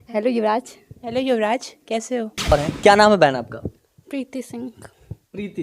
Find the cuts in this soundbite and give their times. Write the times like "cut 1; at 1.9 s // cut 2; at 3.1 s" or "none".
cut 1; at 2.5 s